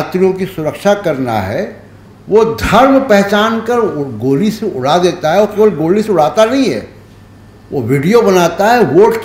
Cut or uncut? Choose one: uncut